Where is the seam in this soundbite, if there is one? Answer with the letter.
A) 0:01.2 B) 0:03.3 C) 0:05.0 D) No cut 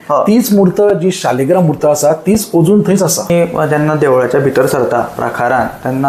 B